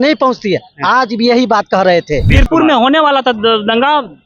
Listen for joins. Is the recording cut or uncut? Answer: cut